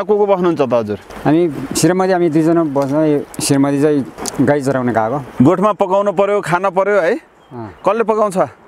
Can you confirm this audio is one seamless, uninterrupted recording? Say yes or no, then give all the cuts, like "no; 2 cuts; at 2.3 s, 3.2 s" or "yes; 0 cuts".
no; 4 cuts; at 1.0 s, 3.3 s, 4.2 s, 5.3 s